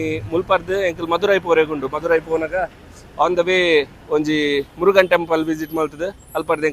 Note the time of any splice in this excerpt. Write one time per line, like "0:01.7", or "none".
none